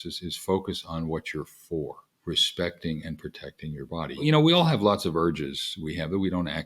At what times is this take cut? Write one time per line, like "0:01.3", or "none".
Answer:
0:02.1
0:04.2